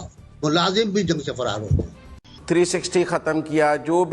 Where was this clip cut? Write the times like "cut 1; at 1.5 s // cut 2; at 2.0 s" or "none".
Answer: cut 1; at 2.4 s